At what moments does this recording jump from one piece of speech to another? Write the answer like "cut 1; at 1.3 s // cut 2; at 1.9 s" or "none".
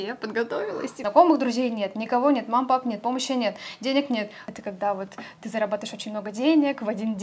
cut 1; at 0.9 s // cut 2; at 4.3 s